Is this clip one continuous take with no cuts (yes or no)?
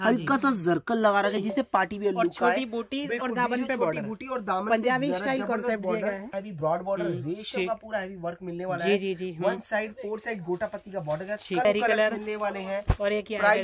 no